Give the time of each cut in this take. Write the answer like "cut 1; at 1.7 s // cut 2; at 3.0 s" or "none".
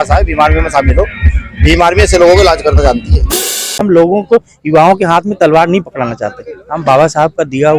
cut 1; at 3.8 s